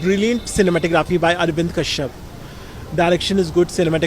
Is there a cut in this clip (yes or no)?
no